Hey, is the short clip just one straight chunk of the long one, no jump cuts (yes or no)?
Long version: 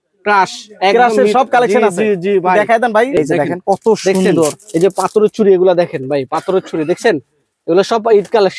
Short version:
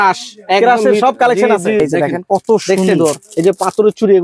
no